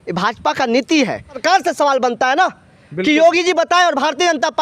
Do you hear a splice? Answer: yes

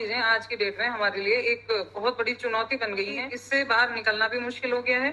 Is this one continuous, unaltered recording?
no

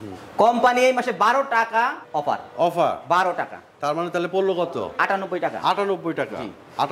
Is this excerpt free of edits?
yes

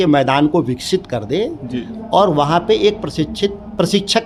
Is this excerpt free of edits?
yes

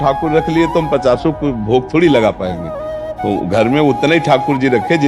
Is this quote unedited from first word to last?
yes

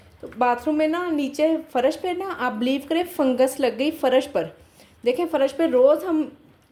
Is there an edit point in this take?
no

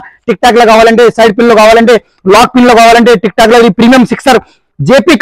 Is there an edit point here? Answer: no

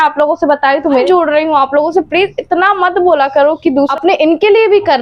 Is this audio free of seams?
no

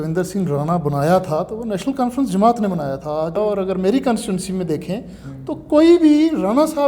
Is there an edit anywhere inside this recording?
yes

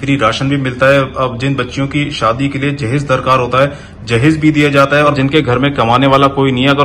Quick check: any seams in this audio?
yes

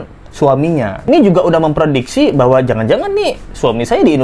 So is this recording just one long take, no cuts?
no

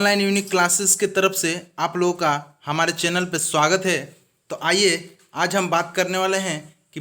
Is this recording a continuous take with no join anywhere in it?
yes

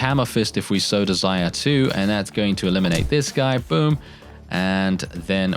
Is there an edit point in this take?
no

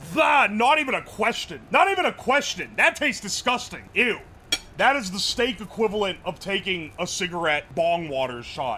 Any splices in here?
no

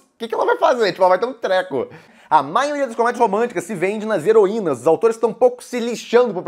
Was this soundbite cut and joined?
yes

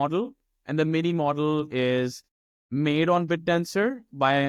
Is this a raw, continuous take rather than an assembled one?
yes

